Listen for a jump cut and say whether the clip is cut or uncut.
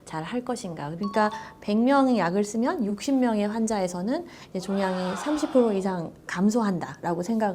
cut